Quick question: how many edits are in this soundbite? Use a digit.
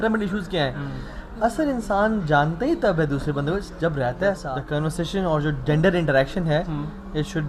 1